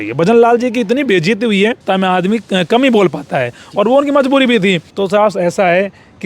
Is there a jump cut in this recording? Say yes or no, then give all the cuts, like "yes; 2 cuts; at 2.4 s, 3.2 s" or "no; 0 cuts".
yes; 2 cuts; at 1.8 s, 4.9 s